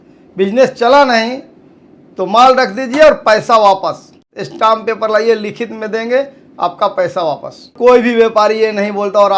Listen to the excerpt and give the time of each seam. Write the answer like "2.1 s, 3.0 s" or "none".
4.1 s, 7.7 s